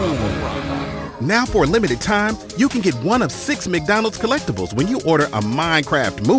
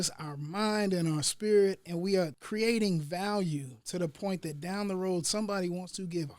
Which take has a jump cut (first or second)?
second